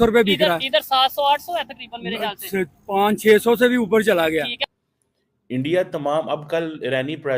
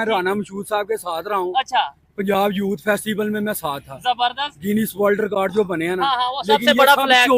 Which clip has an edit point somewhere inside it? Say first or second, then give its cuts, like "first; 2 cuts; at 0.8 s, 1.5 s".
first; 1 cut; at 4.5 s